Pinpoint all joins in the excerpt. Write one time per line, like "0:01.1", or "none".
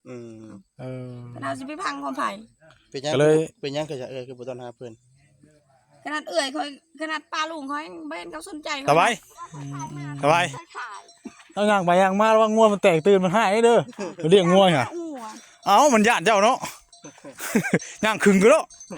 0:08.7